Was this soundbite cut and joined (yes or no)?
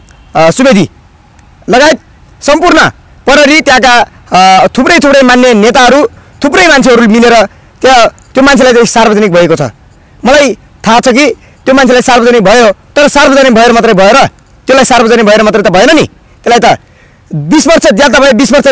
no